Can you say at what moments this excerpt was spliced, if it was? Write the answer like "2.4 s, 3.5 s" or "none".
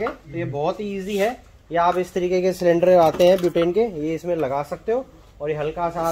none

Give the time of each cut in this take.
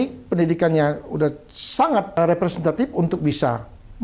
2.2 s

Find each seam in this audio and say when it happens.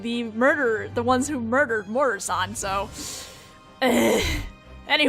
3.0 s

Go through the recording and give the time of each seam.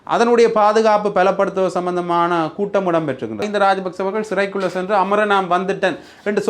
3.4 s

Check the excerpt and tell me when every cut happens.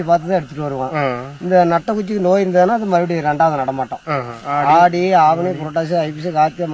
4.4 s

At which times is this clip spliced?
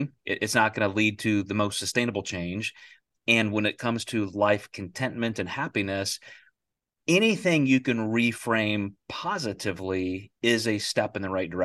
none

